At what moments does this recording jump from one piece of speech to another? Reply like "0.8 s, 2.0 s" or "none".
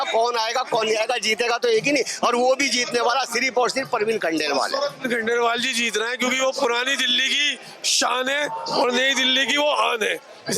5.0 s